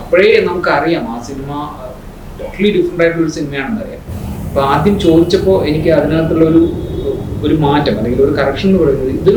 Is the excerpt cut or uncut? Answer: uncut